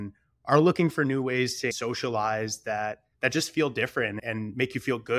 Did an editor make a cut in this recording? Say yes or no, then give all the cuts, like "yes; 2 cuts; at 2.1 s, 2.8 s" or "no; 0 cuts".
yes; 3 cuts; at 1.7 s, 3.1 s, 4.2 s